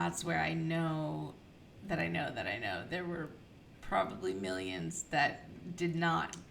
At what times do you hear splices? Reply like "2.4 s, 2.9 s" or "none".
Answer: none